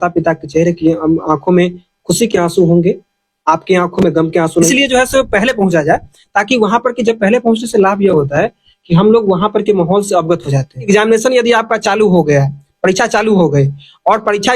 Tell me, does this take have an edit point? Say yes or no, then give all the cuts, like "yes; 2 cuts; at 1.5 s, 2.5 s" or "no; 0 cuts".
yes; 2 cuts; at 4.5 s, 10.9 s